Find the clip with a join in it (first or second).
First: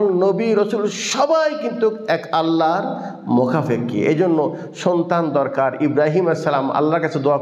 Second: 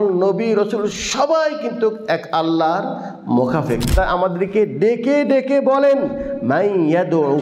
second